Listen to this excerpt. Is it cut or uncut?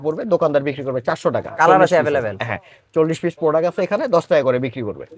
uncut